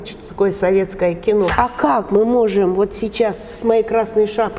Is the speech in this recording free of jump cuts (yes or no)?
no